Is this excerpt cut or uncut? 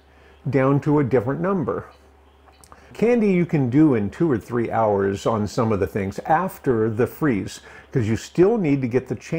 cut